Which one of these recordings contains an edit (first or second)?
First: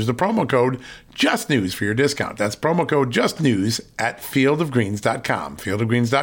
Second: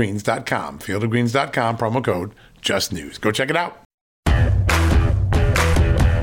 second